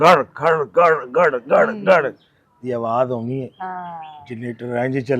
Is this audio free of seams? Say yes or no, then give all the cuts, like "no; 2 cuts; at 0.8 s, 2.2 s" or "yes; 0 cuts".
yes; 0 cuts